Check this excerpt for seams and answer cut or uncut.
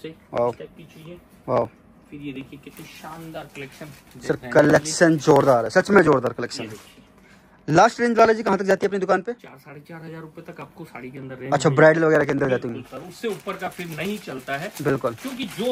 uncut